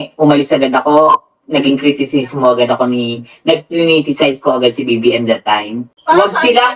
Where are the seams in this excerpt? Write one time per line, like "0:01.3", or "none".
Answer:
0:05.9